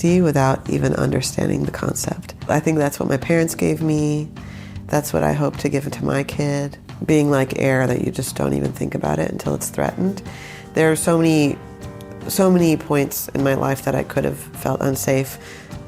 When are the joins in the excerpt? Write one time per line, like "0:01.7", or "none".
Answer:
0:02.3
0:06.9